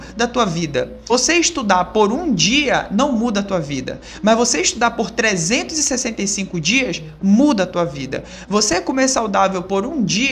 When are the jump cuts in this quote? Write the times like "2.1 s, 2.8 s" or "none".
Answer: 1.1 s